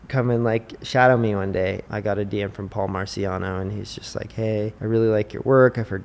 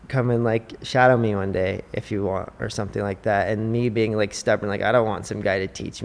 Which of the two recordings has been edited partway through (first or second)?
first